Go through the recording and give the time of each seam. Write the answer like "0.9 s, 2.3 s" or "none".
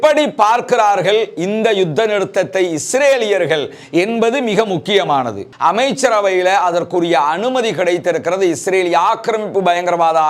5.4 s